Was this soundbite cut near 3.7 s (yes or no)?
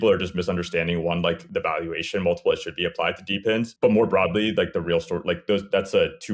yes